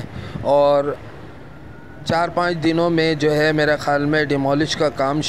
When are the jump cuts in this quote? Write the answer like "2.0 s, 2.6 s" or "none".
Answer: none